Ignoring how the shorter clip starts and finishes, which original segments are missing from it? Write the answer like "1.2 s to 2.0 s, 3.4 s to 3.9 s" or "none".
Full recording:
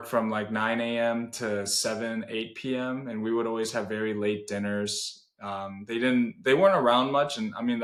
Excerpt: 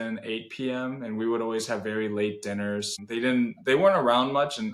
5.0 s to 5.8 s

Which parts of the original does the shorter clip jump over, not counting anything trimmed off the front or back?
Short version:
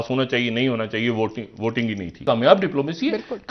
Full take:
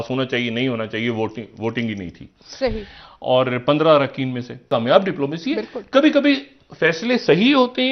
2.1 s to 4.5 s

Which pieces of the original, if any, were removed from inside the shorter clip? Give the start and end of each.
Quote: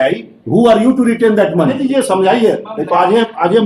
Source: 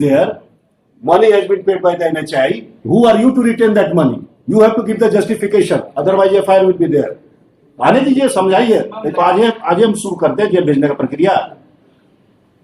4.2 s to 8.0 s

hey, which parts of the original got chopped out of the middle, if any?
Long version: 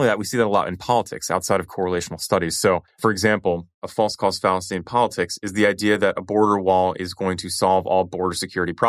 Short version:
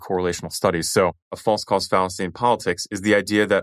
2.9 s to 3.7 s

